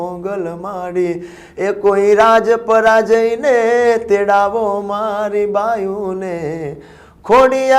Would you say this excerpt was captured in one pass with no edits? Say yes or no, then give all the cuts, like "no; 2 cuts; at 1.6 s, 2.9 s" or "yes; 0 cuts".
yes; 0 cuts